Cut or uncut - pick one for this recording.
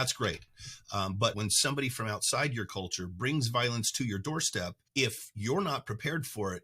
cut